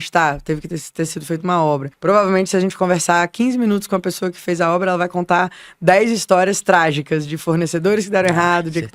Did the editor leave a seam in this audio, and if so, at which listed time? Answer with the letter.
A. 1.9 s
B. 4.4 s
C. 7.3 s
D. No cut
A